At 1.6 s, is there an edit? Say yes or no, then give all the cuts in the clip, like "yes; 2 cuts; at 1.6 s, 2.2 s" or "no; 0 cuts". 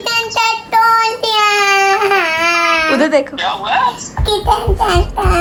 no; 0 cuts